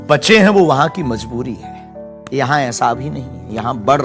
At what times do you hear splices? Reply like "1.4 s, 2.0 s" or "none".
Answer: 2.1 s